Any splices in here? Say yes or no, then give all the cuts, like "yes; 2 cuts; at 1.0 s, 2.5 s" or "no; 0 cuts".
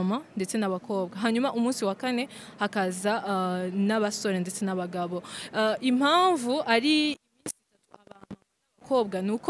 no; 0 cuts